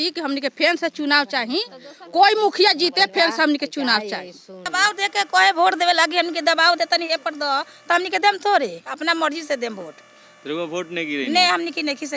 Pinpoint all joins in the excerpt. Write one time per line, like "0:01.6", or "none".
0:04.7